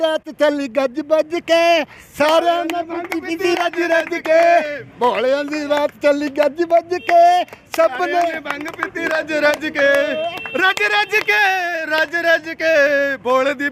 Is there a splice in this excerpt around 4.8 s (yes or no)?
no